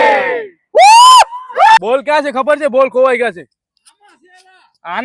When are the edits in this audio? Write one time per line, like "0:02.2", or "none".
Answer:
0:01.5